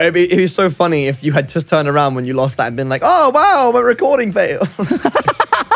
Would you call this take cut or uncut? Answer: cut